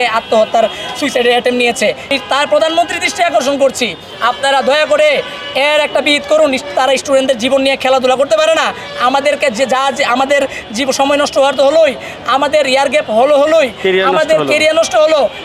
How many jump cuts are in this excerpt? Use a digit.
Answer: 1